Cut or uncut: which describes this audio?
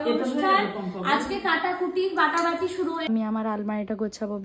cut